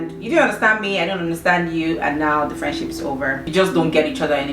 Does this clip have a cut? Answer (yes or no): yes